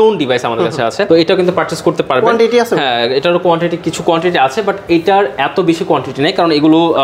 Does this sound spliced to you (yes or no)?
no